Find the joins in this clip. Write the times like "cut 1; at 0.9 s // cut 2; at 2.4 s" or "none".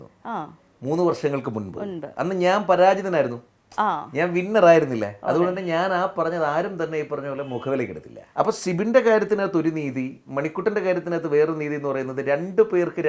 cut 1; at 8.2 s